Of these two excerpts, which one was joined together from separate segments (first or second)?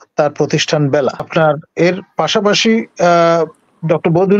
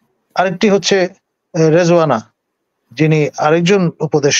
first